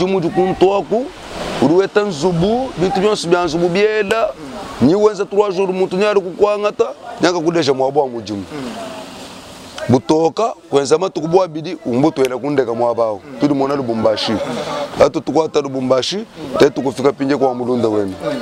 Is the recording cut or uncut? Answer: uncut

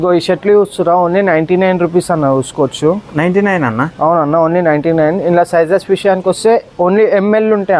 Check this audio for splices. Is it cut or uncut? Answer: uncut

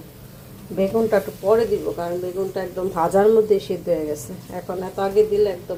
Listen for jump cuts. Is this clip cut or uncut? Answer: uncut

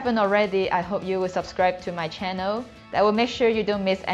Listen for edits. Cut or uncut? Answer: uncut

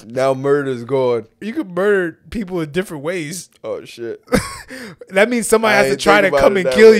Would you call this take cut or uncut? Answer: cut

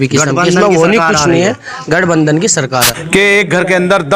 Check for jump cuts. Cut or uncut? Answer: cut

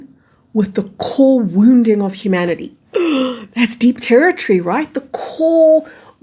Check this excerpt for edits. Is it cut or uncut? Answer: uncut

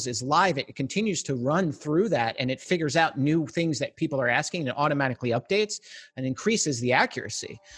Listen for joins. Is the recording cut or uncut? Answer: uncut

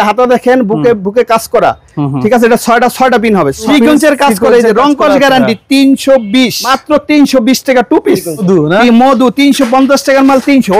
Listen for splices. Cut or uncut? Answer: cut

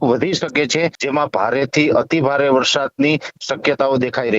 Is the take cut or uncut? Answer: cut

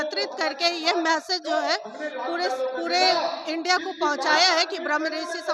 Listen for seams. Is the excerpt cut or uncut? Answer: uncut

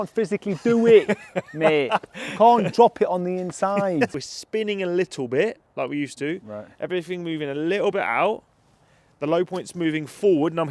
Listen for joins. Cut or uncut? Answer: cut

